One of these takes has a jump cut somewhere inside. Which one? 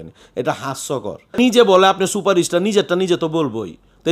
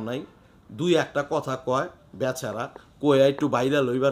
first; 1 cut; at 1.3 s

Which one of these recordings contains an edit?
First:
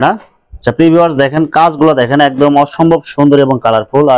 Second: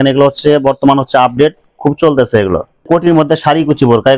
second; 1 cut; at 2.7 s

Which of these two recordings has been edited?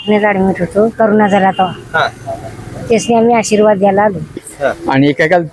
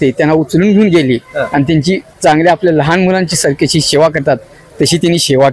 first; 2 cuts; at 0.9 s, 4.4 s

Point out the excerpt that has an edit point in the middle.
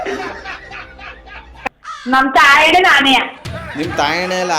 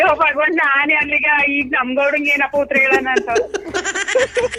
first; 1 cut; at 1.5 s

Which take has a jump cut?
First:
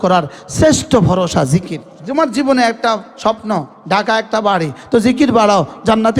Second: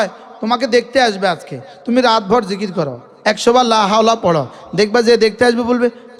first; 1 cut; at 1.8 s

